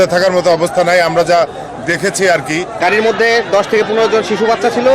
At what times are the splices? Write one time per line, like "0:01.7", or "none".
0:02.8

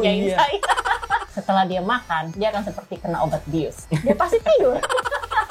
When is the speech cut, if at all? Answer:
0:01.3
0:02.3
0:03.8

